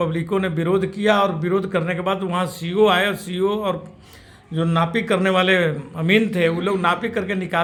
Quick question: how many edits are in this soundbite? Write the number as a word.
zero